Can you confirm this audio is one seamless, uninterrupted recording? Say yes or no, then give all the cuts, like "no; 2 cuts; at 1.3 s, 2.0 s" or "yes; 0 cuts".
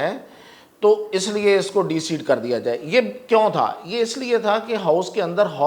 yes; 0 cuts